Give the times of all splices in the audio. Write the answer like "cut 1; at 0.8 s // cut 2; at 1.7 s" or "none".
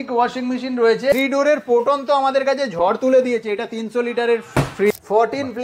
cut 1; at 1.1 s // cut 2; at 4.9 s